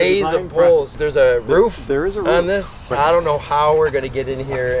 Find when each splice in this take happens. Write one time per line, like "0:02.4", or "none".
0:01.0

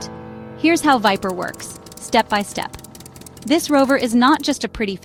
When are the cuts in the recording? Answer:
none

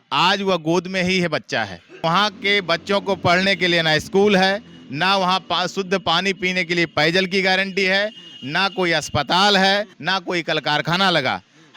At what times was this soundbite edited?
0:02.0
0:10.0

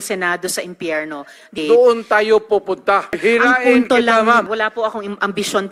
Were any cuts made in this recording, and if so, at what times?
0:01.5
0:03.2
0:04.5

